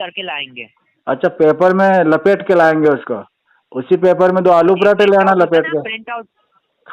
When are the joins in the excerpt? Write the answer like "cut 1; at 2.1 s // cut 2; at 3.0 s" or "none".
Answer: none